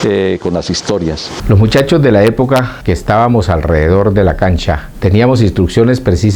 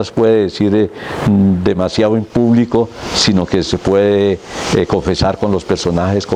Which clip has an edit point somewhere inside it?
first; 1 cut; at 1.3 s

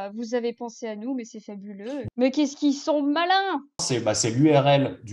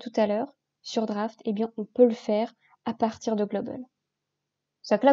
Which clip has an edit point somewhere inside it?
first; 2 cuts; at 2.0 s, 3.9 s

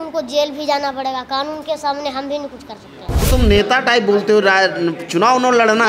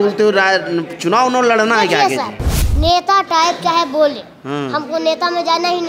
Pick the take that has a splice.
first; 1 cut; at 3.2 s

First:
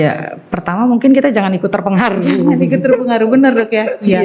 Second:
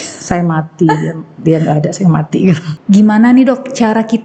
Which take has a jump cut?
second; 1 cut; at 2.7 s

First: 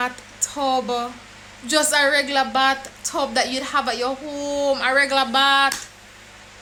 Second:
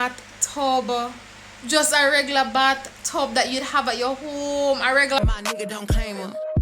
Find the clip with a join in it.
second; 1 cut; at 5.2 s

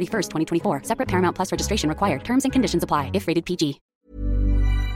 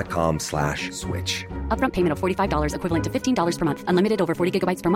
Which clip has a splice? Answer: first; 1 cut; at 3.8 s

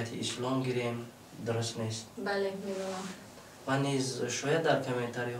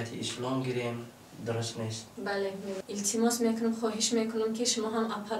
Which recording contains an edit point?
second; 1 cut; at 2.8 s

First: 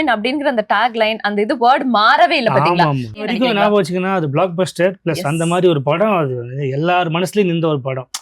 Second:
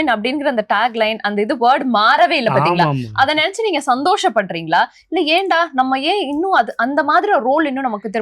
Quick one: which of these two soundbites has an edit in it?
first; 1 cut; at 3.2 s

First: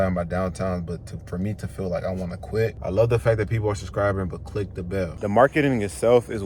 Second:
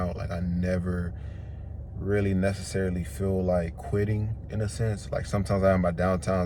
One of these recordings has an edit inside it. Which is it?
first; 2 cuts; at 2.8 s, 5.2 s

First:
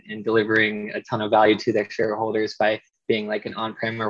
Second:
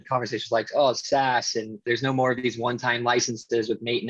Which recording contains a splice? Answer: second; 1 cut; at 1.8 s

